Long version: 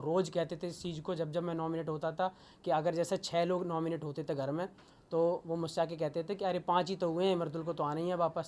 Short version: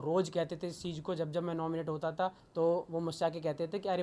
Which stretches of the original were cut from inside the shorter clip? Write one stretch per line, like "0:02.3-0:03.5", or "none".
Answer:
0:02.4-0:05.0